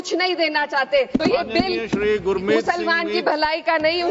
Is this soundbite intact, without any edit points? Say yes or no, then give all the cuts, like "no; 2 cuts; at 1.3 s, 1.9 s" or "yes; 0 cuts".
no; 1 cut; at 1.2 s